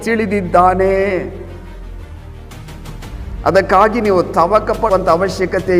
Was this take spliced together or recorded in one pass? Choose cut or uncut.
cut